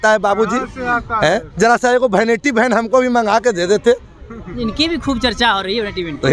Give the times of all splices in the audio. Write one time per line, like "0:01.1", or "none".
none